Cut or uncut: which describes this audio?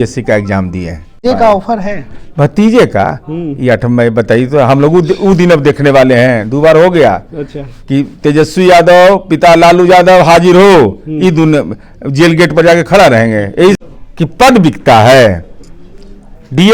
cut